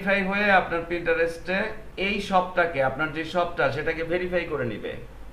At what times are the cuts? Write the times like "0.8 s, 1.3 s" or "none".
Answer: 1.8 s